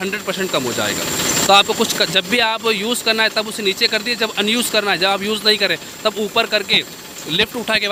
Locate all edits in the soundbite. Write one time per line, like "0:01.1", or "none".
none